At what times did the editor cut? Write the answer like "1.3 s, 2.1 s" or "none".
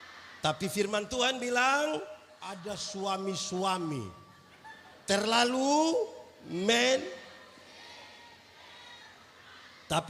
2.5 s

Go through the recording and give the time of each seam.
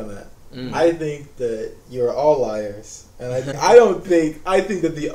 3.5 s

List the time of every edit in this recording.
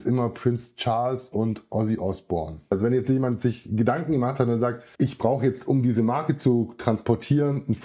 2.7 s, 4.8 s

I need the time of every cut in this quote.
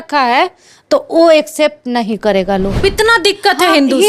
2.8 s

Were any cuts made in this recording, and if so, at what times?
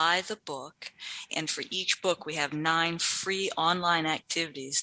1.3 s

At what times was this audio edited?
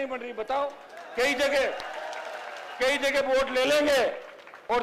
none

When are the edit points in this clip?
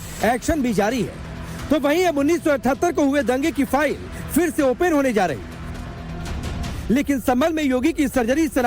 7.2 s

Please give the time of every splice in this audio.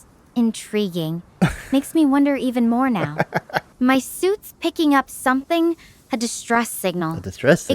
3.6 s

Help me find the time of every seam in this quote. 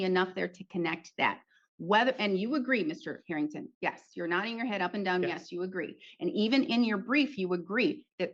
none

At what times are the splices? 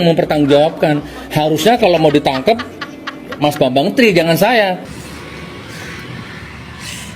4.8 s

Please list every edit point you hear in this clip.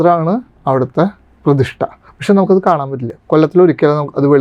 2.1 s

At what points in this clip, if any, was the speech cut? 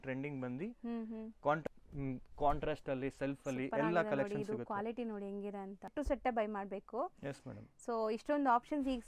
1.6 s, 5.9 s

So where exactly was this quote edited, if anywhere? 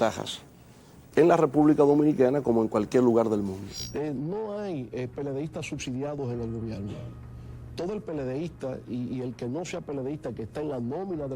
3.8 s

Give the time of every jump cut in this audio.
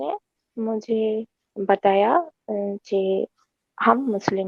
none

